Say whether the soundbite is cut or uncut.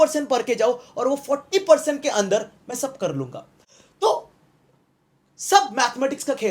uncut